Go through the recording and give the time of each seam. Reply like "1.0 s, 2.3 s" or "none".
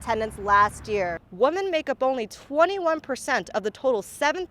1.2 s